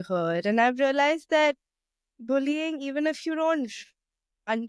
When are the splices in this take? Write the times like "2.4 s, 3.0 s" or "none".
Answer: none

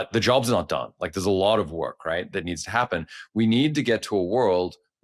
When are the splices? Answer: none

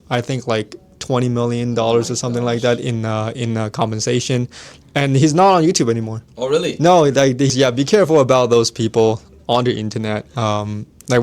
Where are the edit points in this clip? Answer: 7.5 s

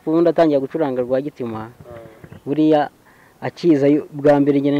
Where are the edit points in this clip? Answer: none

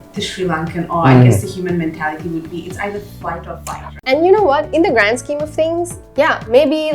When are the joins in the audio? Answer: 3.9 s

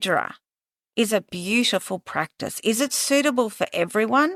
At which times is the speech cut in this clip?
none

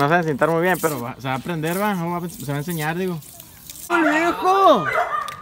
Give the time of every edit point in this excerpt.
3.9 s

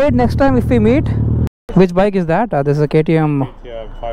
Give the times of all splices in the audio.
1.5 s

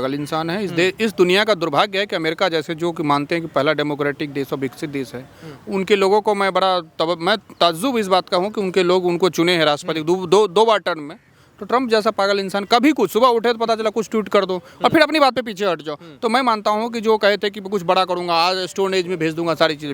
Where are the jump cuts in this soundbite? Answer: none

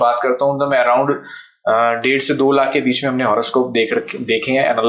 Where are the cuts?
none

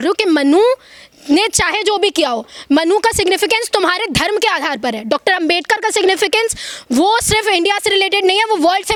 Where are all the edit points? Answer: none

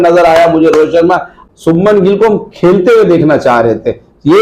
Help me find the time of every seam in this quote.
1.4 s

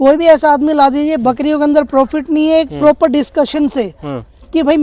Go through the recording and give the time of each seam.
none

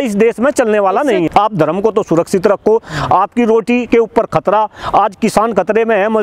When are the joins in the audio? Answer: 1.3 s

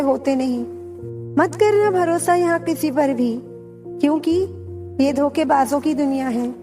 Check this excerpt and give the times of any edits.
1.3 s

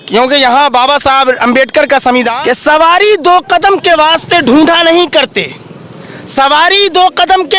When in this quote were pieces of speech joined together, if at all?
2.3 s

